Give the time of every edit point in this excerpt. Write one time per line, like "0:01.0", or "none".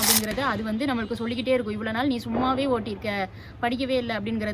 none